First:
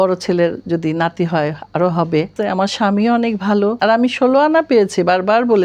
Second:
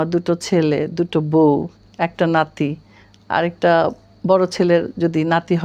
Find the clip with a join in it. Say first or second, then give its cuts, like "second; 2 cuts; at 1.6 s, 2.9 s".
first; 2 cuts; at 2.3 s, 3.8 s